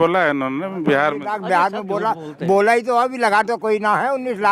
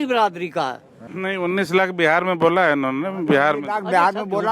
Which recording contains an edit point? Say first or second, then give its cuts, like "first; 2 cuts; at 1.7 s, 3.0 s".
second; 1 cut; at 1.1 s